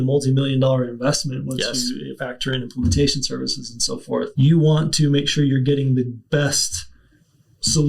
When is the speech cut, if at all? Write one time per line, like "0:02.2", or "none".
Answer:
0:04.3